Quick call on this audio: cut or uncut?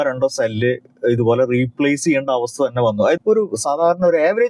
cut